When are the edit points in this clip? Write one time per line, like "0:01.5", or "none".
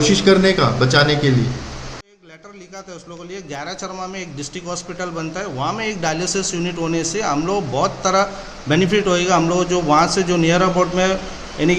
0:02.3